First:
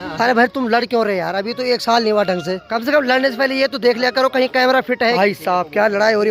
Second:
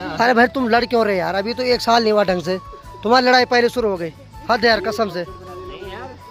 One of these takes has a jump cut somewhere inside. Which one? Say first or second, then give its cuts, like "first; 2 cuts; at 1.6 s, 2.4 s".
first; 2 cuts; at 2.6 s, 5.2 s